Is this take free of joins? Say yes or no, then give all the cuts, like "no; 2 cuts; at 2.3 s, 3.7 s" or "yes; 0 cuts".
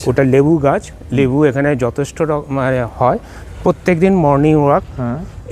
no; 1 cut; at 3.4 s